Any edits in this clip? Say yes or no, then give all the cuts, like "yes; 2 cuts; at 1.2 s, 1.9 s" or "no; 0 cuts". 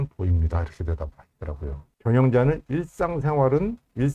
yes; 1 cut; at 1.9 s